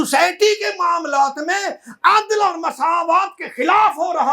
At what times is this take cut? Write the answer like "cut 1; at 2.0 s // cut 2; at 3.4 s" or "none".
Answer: none